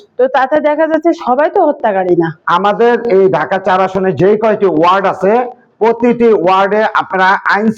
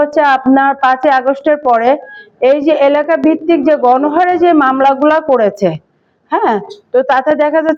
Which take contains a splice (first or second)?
first